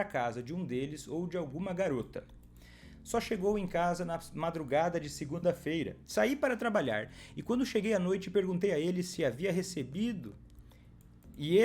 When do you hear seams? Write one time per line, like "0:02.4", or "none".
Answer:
0:06.0